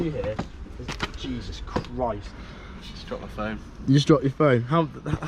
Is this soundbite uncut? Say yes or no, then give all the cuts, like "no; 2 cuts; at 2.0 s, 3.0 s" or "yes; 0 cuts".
no; 1 cut; at 2.3 s